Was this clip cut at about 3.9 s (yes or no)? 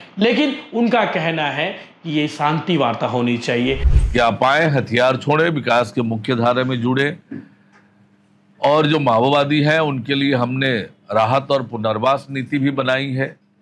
yes